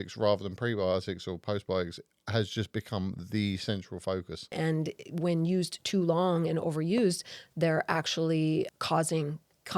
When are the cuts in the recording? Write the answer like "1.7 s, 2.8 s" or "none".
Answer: 4.5 s, 8.7 s